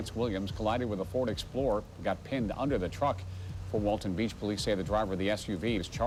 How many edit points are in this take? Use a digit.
0